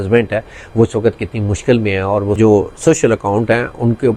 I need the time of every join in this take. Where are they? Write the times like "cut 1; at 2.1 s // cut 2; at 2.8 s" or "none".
cut 1; at 2.3 s